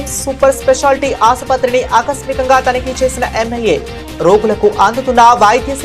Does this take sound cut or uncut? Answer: uncut